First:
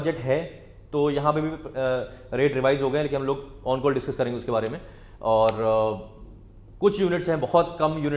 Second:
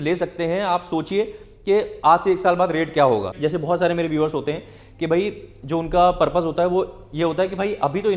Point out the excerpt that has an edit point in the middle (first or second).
second